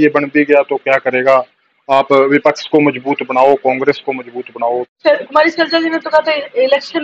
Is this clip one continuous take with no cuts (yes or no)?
no